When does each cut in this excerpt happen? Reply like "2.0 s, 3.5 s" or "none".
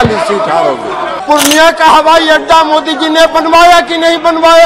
1.1 s